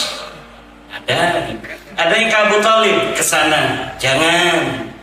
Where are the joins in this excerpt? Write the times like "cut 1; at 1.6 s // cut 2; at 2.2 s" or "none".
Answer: cut 1; at 3.9 s